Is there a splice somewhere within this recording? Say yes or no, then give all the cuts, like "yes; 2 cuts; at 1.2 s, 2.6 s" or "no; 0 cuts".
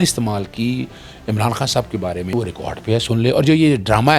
yes; 1 cut; at 2.3 s